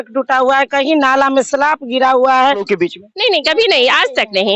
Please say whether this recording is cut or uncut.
cut